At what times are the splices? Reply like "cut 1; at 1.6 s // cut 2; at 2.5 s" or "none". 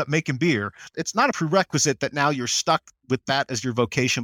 cut 1; at 1.0 s